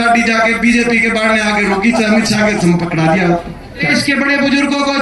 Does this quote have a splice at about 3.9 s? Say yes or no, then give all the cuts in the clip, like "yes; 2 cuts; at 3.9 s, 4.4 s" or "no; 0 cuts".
yes; 1 cut; at 3.9 s